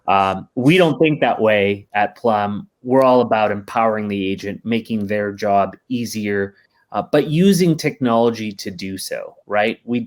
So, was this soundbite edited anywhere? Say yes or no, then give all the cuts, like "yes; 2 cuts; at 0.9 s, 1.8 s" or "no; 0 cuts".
no; 0 cuts